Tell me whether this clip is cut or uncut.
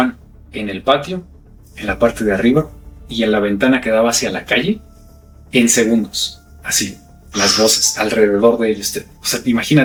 uncut